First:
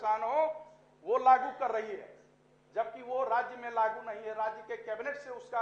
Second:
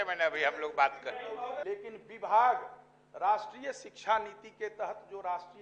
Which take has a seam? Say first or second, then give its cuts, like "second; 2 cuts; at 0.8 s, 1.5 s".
second; 1 cut; at 1.6 s